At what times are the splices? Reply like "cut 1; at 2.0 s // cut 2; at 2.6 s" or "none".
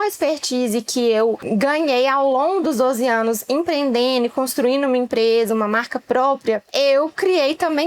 cut 1; at 1.4 s // cut 2; at 6.7 s

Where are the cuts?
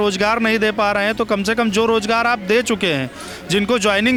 none

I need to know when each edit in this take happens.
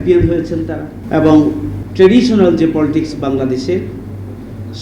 cut 1; at 0.9 s // cut 2; at 1.8 s

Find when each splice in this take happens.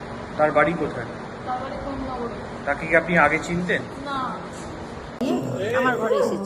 cut 1; at 5.2 s

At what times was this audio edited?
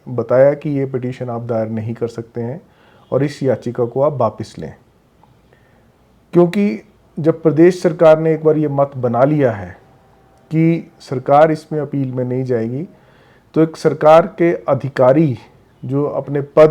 none

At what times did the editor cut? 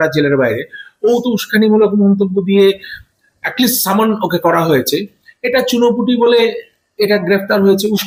none

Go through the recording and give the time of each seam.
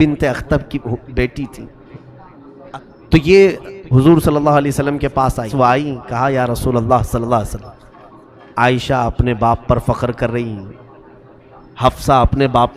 cut 1; at 2.7 s // cut 2; at 5.5 s

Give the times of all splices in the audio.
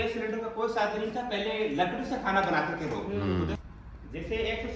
cut 1; at 3.6 s

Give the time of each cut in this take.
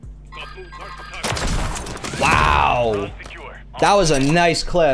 cut 1; at 2.2 s

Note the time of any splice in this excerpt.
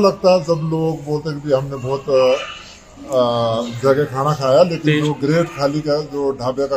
none

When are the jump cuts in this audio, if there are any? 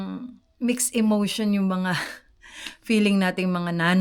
none

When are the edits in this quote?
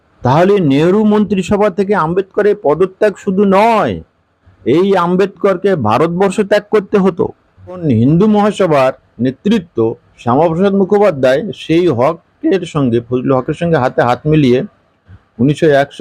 cut 1; at 7.8 s

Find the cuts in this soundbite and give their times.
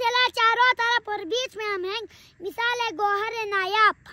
none

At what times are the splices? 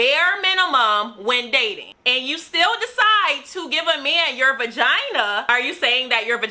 cut 1; at 5.4 s

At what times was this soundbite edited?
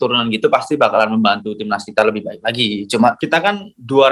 cut 1; at 3.2 s

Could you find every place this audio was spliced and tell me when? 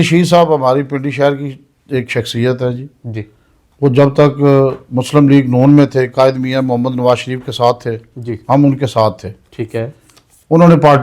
none

